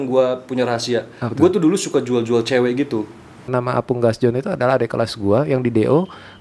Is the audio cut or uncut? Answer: cut